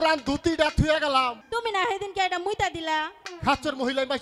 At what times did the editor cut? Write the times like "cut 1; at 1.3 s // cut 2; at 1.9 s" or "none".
cut 1; at 1.4 s // cut 2; at 3.1 s